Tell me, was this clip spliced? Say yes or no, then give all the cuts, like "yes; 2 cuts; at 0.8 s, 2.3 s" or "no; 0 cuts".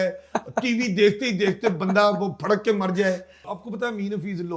yes; 1 cut; at 3.5 s